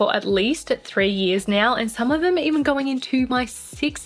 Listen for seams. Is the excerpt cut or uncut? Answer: uncut